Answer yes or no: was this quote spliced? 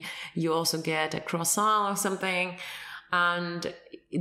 no